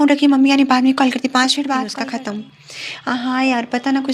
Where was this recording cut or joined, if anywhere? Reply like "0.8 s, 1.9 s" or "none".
1.9 s